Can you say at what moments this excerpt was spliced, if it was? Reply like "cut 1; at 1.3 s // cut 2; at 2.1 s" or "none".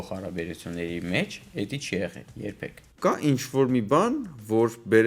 cut 1; at 2.9 s

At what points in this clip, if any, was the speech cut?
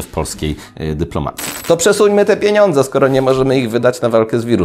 cut 1; at 1.5 s

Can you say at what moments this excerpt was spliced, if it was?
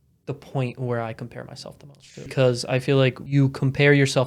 cut 1; at 2.3 s // cut 2; at 3.2 s

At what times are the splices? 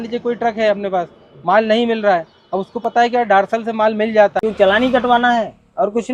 cut 1; at 4.4 s

